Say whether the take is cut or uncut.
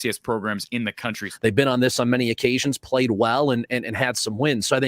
cut